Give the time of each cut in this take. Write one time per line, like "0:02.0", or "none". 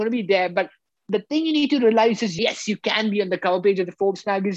0:02.3

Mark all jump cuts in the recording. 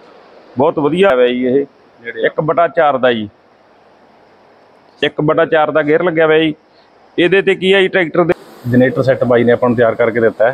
0:01.1
0:08.3

